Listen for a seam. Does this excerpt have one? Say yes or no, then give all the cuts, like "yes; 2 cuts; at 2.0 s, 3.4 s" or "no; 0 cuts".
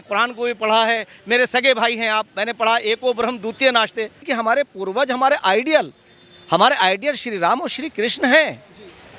yes; 1 cut; at 4.3 s